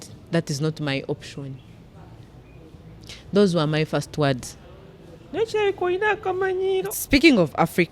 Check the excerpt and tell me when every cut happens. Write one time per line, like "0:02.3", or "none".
0:07.0